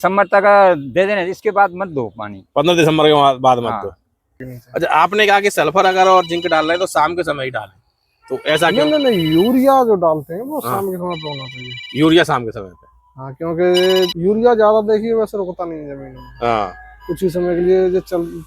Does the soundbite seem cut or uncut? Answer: cut